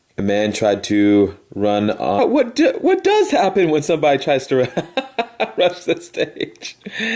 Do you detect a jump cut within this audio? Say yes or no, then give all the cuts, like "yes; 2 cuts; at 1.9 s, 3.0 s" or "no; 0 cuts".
no; 0 cuts